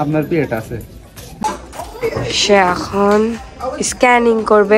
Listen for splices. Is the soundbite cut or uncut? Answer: cut